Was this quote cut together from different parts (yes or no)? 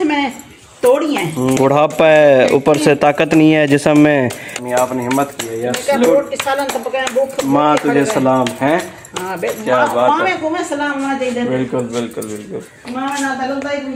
no